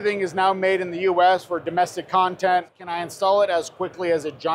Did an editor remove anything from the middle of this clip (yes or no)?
yes